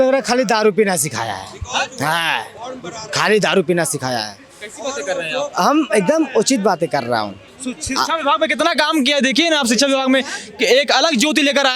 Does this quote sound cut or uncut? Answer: uncut